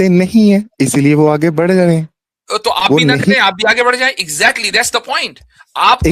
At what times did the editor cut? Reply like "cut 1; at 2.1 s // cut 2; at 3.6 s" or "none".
none